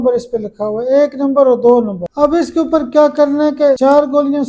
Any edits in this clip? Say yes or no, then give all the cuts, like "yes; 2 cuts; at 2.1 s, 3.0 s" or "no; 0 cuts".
yes; 2 cuts; at 2.0 s, 3.8 s